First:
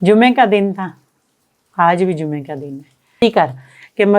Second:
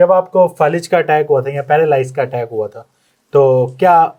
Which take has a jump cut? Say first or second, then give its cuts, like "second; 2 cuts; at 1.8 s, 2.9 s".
first; 1 cut; at 3.2 s